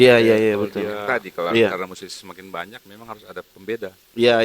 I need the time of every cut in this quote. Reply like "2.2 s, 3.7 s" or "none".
1.0 s